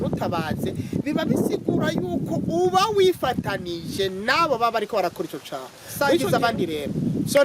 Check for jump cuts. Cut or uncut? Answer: cut